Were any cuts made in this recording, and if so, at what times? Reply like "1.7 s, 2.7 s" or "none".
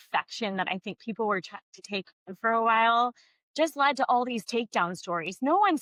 none